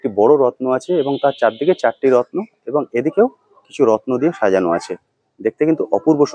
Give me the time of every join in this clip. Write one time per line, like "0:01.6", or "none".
none